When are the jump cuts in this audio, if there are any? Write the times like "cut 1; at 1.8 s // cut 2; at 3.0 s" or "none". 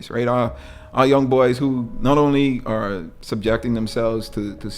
cut 1; at 3.1 s